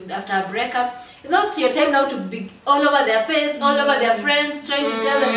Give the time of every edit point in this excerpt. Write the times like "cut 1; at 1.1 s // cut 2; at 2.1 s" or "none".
none